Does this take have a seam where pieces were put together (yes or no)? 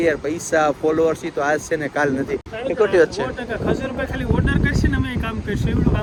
no